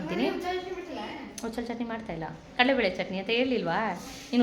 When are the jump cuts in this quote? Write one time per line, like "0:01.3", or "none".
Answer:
none